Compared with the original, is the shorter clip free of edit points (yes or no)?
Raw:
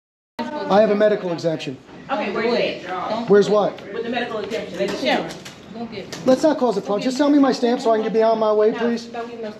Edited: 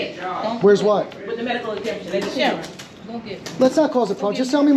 yes